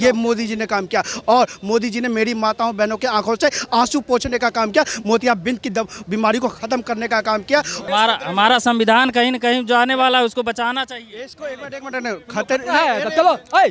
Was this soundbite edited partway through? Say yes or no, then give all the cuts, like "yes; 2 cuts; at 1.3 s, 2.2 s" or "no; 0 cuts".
yes; 1 cut; at 7.7 s